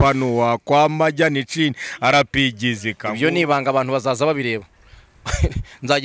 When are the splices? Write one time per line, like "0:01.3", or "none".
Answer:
0:03.0

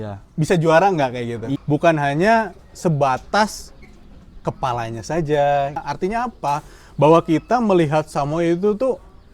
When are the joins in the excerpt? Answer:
0:01.5
0:05.9

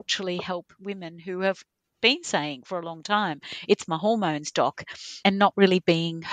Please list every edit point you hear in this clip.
none

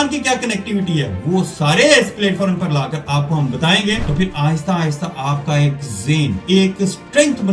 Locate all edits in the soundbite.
0:04.1
0:06.4

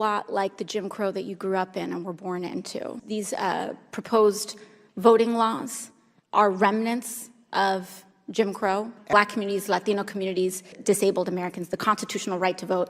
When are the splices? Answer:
0:03.0
0:09.1
0:10.8

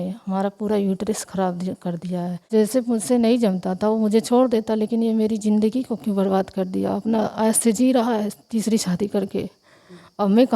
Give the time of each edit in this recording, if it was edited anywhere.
0:02.4

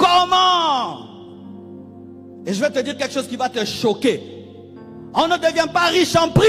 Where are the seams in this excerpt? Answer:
none

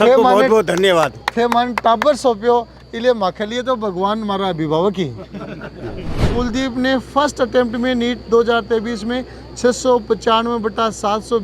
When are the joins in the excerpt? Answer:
0:06.1

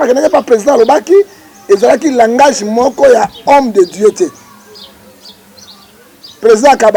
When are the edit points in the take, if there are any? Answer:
none

